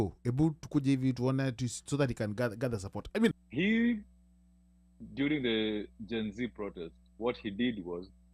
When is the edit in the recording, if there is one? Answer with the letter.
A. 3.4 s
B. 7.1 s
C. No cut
A